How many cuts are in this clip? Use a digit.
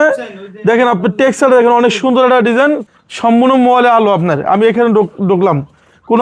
1